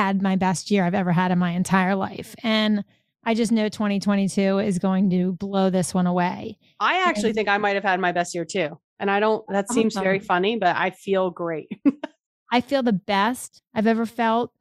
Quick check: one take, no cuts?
yes; 0 cuts

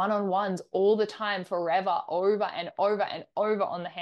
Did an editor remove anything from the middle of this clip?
no; 0 cuts

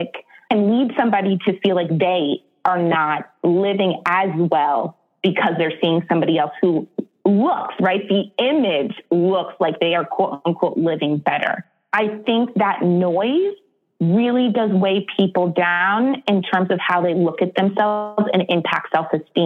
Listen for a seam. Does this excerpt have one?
yes; 1 cut; at 11.8 s

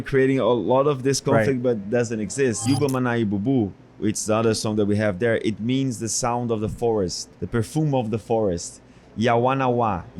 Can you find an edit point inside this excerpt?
yes; 3 cuts; at 2.6 s, 7.2 s, 9.0 s

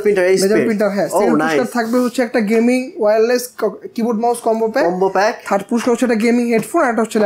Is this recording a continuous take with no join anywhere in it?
yes; 0 cuts

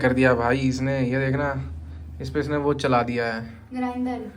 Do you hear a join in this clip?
no; 0 cuts

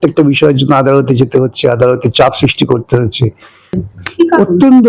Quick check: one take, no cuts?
no; 1 cut; at 3.8 s

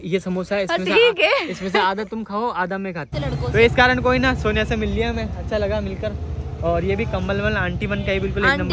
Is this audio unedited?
no; 1 cut; at 3.1 s

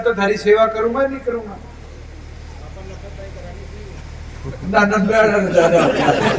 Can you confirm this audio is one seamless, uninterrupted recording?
yes; 0 cuts

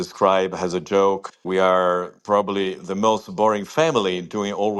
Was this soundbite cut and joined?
yes; 1 cut; at 1.2 s

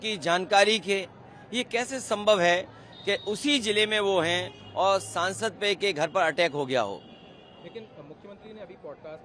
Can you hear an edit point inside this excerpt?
no; 0 cuts

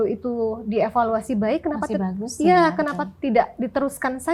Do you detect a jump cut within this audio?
no; 0 cuts

